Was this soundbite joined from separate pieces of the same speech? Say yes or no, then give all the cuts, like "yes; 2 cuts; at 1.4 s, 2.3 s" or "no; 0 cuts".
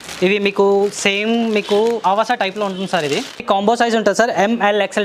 yes; 1 cut; at 3.4 s